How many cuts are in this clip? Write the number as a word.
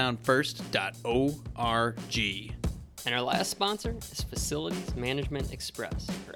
one